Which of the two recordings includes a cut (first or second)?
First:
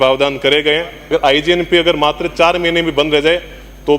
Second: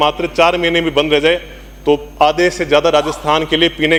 first